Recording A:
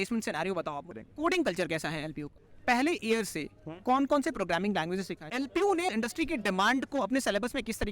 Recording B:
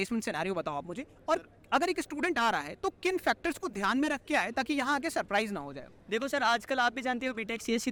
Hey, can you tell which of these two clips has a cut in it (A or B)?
A